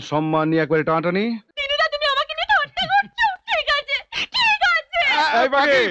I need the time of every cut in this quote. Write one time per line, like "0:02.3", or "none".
0:01.5